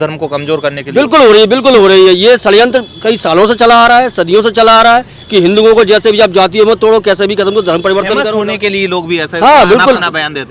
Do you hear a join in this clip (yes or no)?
yes